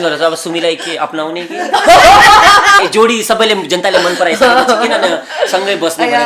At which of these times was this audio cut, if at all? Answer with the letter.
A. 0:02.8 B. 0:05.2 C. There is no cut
A